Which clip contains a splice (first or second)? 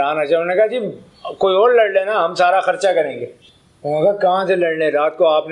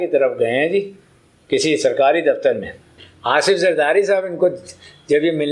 second